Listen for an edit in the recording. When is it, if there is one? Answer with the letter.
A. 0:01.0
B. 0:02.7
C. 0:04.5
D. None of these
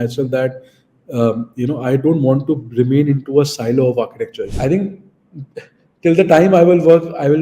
C